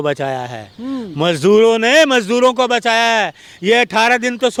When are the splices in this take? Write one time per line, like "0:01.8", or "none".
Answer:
none